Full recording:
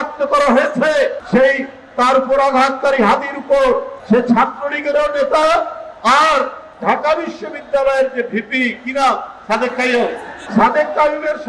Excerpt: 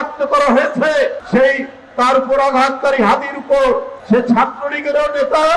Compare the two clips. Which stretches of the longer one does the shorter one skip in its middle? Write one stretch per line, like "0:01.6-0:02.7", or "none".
none